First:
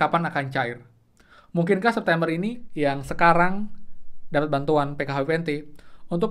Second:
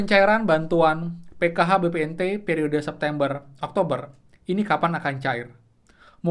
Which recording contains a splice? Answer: first; 1 cut; at 2.6 s

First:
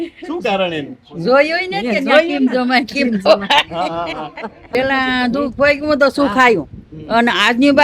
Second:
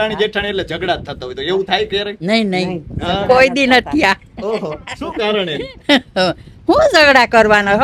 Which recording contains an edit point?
first; 1 cut; at 4.7 s

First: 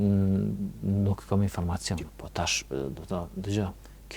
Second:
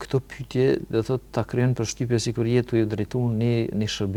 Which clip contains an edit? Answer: first; 1 cut; at 2.0 s

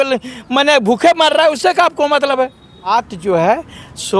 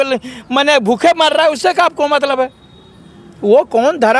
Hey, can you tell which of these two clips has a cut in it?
first; 1 cut; at 2.9 s

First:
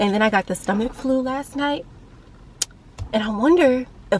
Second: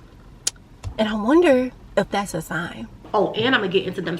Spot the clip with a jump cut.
second; 1 cut; at 3.0 s

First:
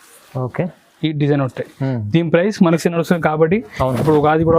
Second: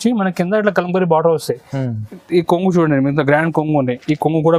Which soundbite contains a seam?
first; 1 cut; at 2.8 s

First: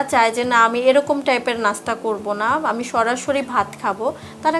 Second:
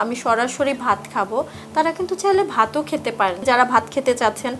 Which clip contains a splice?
second; 1 cut; at 3.4 s

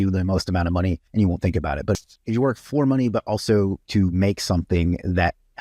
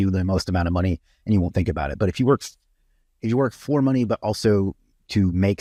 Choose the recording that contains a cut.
first; 3 cuts; at 1.0 s, 2.0 s, 3.8 s

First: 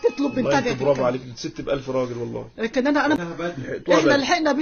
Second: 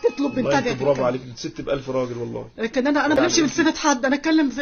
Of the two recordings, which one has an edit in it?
first; 1 cut; at 3.2 s

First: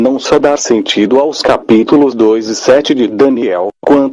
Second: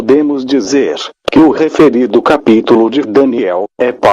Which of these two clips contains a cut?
first; 1 cut; at 2.5 s

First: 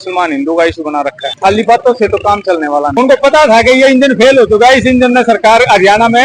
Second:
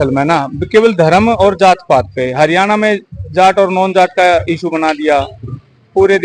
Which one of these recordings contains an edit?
first; 2 cuts; at 1.2 s, 2.9 s

